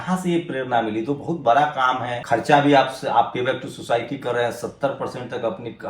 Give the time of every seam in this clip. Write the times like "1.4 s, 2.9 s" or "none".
2.1 s